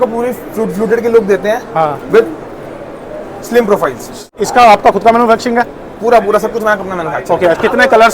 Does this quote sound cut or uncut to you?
cut